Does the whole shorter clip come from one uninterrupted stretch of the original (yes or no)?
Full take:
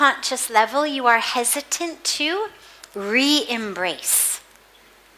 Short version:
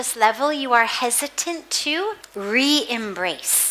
no